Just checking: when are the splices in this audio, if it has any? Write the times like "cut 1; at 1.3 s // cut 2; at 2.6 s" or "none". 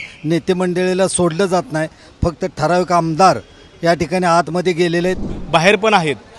cut 1; at 5.3 s